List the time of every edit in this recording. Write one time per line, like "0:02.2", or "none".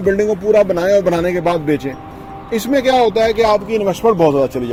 none